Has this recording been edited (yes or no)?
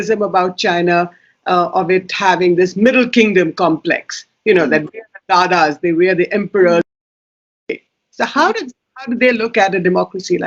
no